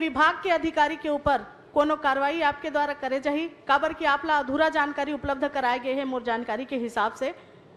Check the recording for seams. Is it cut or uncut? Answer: uncut